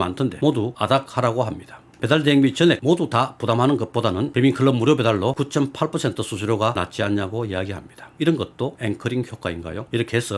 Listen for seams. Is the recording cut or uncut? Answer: uncut